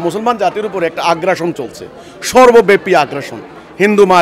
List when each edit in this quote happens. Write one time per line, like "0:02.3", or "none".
none